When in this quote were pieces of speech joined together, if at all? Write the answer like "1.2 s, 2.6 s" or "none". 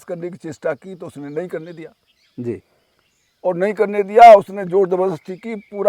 none